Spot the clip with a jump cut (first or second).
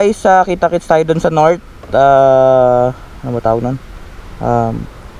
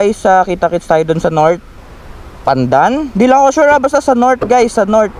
second